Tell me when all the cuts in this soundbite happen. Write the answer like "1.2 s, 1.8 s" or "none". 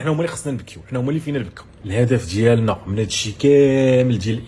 1.8 s